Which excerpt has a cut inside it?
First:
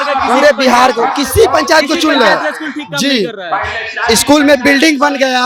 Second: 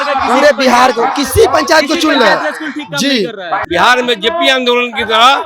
second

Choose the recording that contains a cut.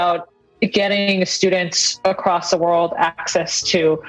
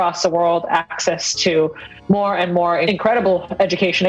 second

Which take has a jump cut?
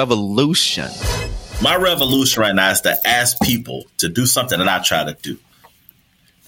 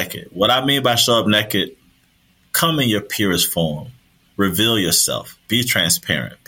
first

